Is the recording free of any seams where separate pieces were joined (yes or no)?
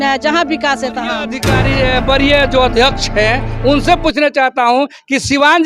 no